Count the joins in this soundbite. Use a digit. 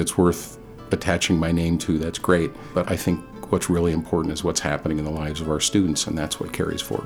1